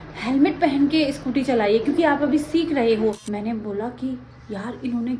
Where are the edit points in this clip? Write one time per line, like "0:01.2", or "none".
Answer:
0:03.3